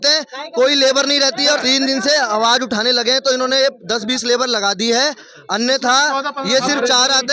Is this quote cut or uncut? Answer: cut